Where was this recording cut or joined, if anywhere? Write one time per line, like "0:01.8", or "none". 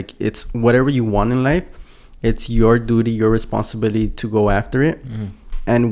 none